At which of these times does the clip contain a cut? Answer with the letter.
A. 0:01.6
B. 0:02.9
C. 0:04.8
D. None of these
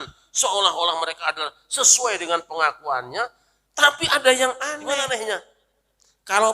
C